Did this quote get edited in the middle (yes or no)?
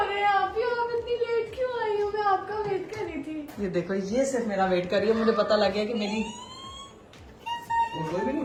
no